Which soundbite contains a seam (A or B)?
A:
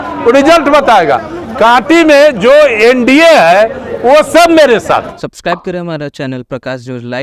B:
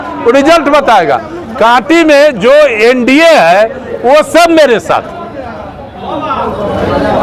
A